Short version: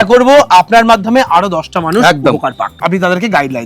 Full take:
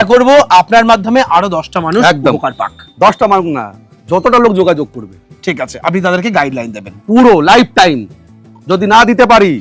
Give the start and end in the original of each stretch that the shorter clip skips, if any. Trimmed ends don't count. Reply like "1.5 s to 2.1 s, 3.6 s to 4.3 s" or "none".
2.7 s to 5.7 s